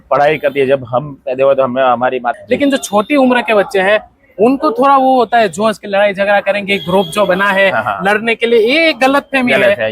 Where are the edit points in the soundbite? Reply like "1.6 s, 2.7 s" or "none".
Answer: 2.3 s